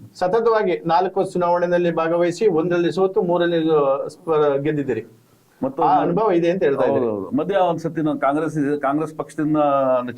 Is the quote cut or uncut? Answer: uncut